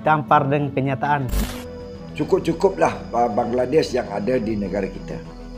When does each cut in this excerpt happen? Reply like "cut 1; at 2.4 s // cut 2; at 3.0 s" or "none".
cut 1; at 1.3 s